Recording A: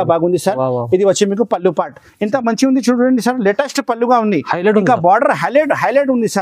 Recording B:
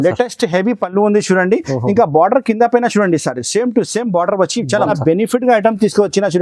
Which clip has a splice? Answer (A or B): B